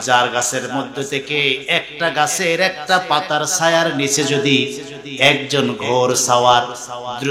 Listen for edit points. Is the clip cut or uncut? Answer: uncut